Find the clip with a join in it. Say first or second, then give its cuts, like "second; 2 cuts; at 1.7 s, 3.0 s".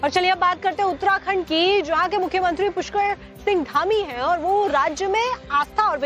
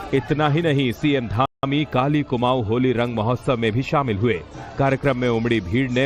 first; 1 cut; at 1.0 s